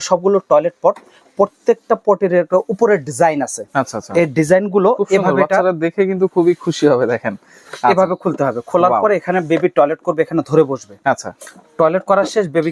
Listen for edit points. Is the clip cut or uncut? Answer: uncut